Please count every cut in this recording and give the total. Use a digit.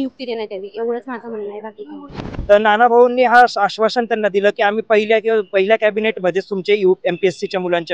1